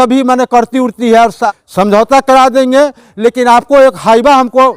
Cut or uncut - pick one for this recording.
cut